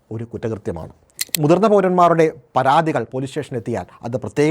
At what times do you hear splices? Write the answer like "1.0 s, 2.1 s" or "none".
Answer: 1.2 s